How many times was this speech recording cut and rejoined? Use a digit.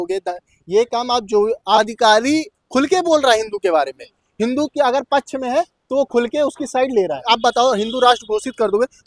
2